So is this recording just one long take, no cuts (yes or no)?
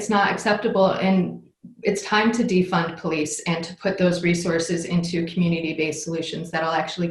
yes